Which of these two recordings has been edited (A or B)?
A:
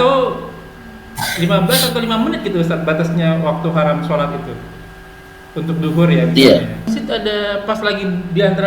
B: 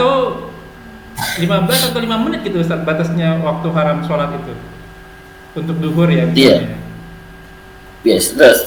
A